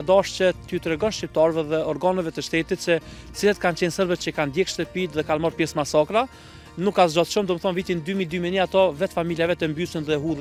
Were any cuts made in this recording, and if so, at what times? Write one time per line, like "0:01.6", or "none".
none